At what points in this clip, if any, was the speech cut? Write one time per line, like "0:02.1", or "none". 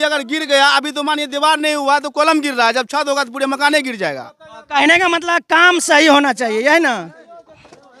none

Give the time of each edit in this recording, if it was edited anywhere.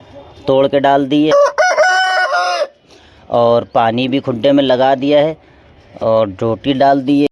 none

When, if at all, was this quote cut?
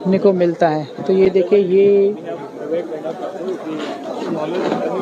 none

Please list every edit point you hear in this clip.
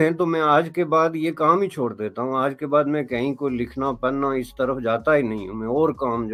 none

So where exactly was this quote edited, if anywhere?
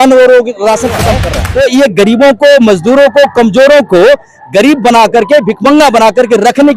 0:01.3

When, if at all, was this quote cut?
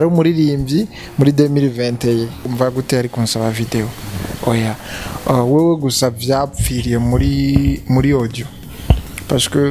0:02.5

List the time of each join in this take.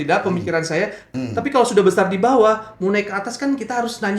0:01.0

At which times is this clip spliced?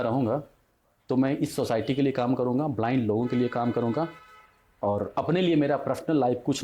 none

